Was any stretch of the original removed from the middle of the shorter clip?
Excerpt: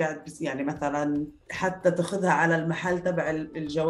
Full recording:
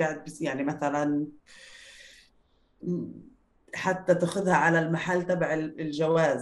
yes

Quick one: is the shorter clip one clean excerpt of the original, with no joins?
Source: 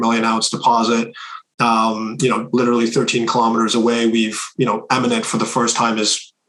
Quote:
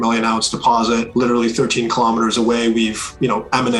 no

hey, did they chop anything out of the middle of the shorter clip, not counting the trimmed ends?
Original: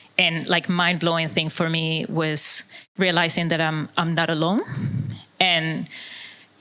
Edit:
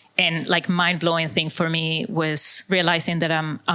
yes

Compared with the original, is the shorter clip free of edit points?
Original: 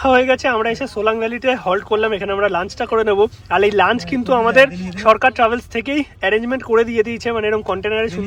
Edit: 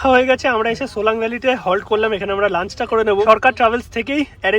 no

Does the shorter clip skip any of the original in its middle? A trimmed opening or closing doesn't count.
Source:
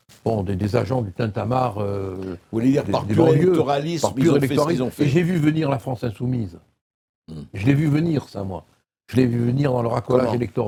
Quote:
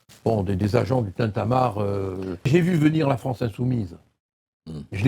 yes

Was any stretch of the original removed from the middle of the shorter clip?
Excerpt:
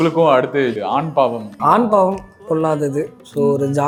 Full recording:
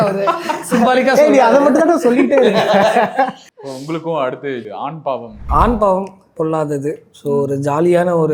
no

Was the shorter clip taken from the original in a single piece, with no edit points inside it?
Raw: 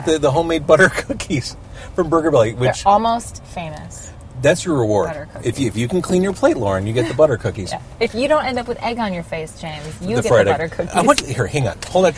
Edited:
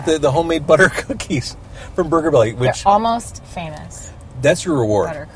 yes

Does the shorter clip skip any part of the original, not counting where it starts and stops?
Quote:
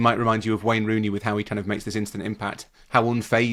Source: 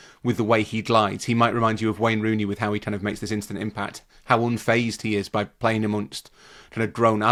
no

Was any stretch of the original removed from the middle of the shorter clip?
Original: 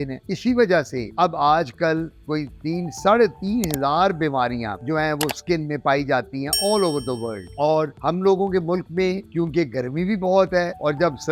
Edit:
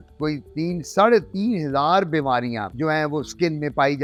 no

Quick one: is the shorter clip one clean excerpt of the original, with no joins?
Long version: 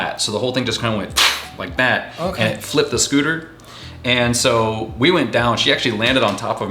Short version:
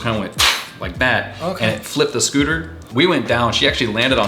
no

